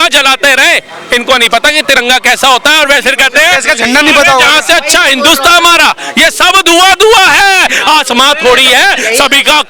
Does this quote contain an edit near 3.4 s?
no; 0 cuts

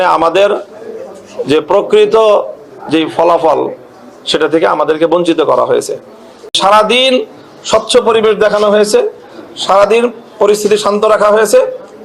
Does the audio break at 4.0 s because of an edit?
no; 1 cut; at 6.6 s

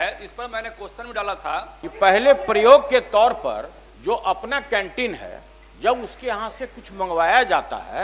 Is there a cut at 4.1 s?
no; 1 cut; at 1.8 s

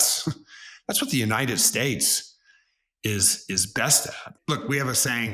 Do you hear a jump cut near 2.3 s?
no; 1 cut; at 4.3 s

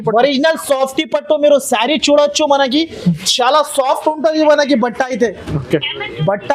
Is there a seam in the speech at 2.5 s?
no; 0 cuts

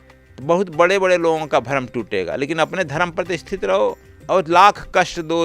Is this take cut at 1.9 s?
no; 1 cut; at 4.1 s

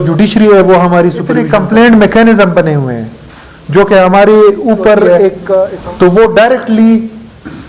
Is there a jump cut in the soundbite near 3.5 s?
no; 2 cuts; at 1.4 s, 5.7 s

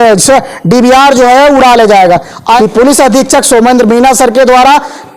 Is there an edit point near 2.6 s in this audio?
yes; 1 cut; at 2.6 s

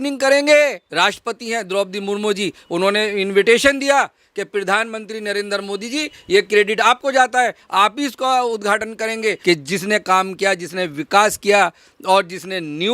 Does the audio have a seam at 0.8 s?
yes; 2 cuts; at 0.8 s, 9.4 s

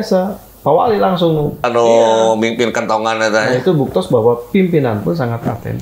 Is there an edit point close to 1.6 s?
yes; 1 cut; at 1.6 s

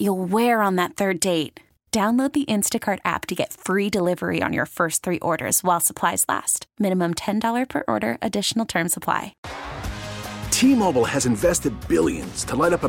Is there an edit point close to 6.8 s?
no; 1 cut; at 9.4 s

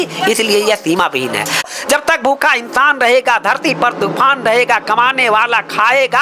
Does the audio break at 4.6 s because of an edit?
no; 1 cut; at 1.7 s

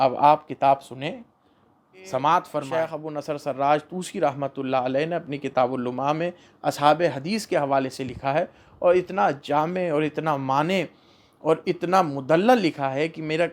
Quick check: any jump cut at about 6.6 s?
no; 1 cut; at 2.8 s

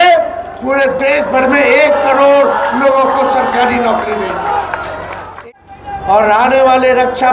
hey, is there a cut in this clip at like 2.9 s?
no; 1 cut; at 5.2 s

